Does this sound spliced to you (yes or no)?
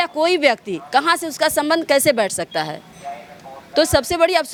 no